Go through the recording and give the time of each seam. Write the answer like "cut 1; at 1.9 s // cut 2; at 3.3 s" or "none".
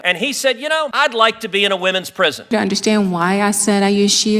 cut 1; at 0.9 s // cut 2; at 2.5 s